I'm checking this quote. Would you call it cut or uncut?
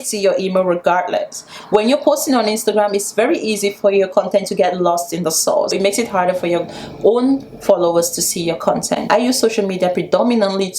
cut